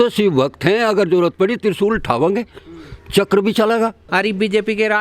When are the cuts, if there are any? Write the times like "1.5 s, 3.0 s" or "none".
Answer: 4.0 s

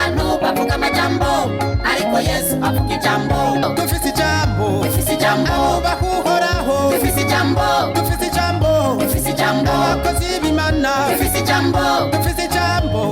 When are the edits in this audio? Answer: 3.6 s

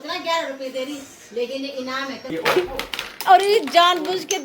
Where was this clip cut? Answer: 2.2 s

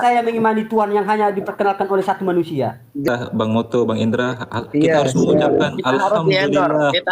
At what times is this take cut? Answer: 3.1 s

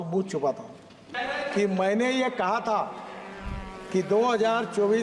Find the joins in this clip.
1.1 s

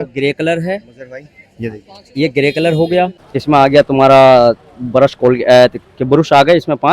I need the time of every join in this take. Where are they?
3.2 s

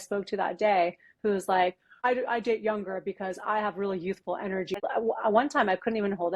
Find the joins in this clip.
2.0 s, 4.8 s

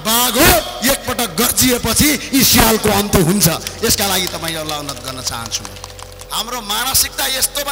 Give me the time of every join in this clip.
6.1 s

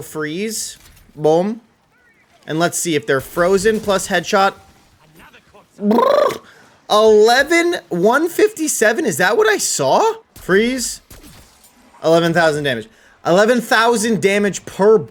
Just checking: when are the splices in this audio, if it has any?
none

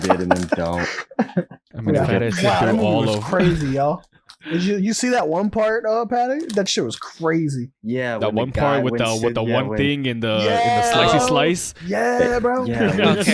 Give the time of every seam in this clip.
1.6 s

